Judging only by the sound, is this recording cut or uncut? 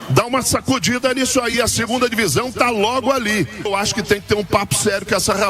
cut